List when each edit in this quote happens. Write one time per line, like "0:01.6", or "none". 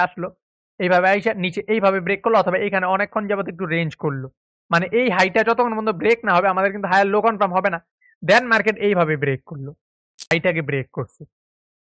0:10.3